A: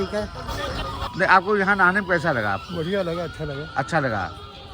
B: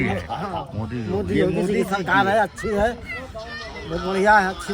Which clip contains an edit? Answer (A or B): A